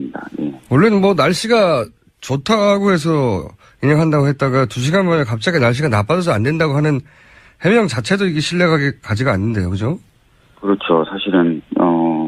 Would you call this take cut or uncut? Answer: uncut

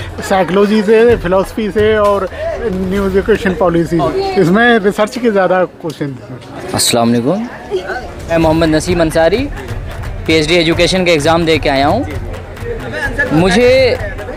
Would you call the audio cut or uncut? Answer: uncut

